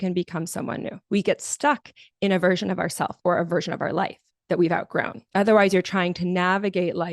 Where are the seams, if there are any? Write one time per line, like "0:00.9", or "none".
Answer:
0:01.0
0:05.2